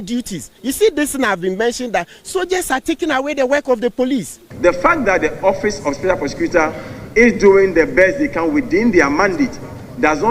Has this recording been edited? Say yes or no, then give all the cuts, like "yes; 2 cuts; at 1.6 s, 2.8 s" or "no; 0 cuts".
yes; 1 cut; at 4.4 s